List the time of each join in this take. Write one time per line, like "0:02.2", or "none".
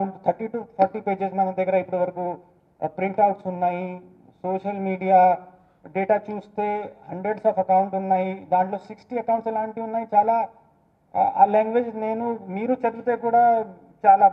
none